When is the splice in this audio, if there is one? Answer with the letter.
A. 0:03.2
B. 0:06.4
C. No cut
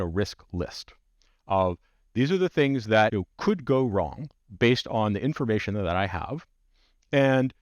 A